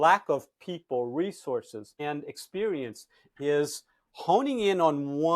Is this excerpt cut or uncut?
cut